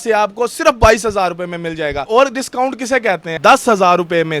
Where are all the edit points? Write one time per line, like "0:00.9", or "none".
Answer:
0:02.0
0:03.3